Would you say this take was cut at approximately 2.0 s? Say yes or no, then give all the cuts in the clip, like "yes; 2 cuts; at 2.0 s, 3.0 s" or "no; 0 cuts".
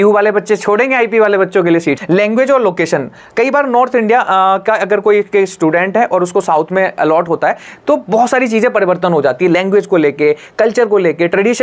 yes; 1 cut; at 2.0 s